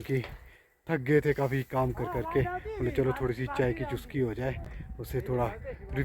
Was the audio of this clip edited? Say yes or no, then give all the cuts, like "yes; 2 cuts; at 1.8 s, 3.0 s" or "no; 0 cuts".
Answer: no; 0 cuts